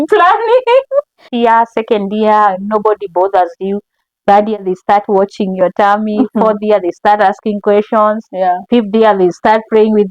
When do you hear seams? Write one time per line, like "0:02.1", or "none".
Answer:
0:01.3